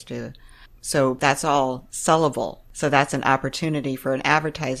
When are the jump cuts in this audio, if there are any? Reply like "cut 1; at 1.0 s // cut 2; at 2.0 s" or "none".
cut 1; at 1.2 s // cut 2; at 2.6 s